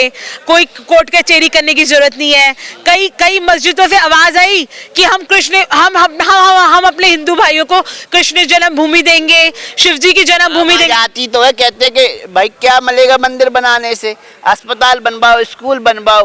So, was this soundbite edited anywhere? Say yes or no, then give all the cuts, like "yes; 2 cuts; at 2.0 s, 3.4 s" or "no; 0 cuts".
no; 0 cuts